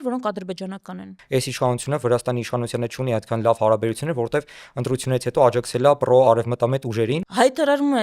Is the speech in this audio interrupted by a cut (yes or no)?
yes